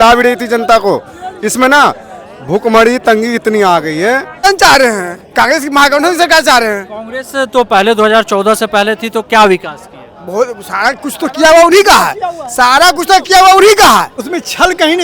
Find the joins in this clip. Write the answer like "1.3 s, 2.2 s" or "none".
4.4 s, 14.2 s